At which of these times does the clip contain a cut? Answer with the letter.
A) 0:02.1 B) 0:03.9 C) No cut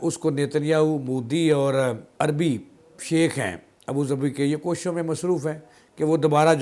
A